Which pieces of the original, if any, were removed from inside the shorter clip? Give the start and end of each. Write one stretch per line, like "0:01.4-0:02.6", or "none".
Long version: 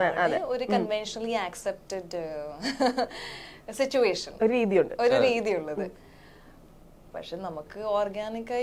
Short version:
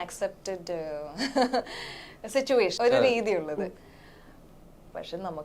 0:04.2-0:04.9